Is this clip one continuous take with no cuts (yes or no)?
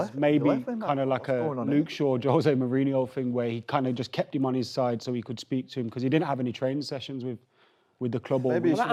yes